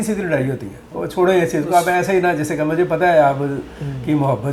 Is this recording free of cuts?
yes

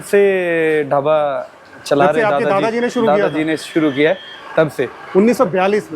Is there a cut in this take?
no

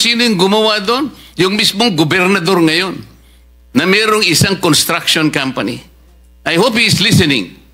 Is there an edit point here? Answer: no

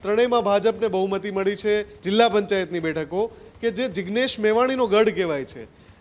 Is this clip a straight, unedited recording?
no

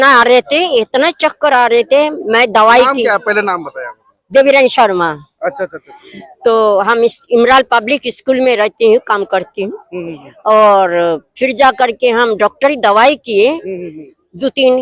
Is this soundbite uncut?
yes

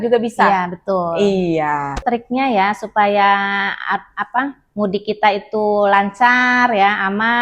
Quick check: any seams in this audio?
yes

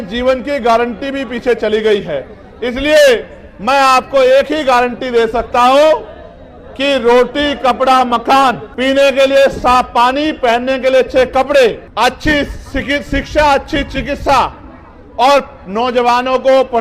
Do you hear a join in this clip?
yes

